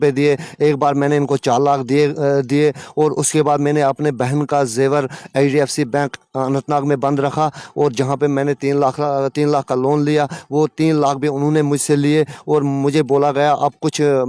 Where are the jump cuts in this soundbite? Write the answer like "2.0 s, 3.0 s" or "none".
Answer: none